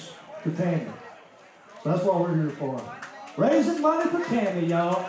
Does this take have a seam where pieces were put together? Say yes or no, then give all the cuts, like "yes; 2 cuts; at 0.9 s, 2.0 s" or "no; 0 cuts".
no; 0 cuts